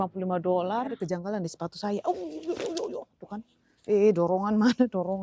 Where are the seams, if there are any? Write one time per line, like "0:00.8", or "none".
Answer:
0:00.9